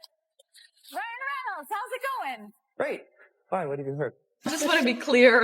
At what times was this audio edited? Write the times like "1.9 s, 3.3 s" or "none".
4.5 s